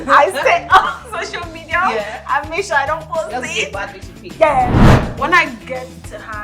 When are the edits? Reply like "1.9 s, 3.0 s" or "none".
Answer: 4.8 s